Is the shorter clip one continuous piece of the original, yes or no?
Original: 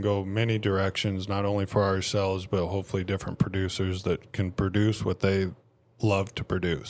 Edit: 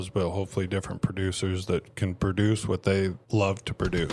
no